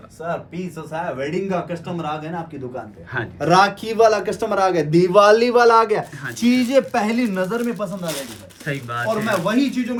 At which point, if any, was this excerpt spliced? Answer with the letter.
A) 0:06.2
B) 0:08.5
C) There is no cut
C